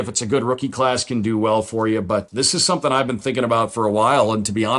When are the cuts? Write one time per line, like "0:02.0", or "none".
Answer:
0:02.3